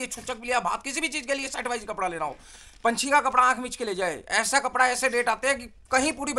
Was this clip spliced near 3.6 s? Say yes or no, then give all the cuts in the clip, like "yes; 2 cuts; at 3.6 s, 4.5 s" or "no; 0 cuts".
no; 0 cuts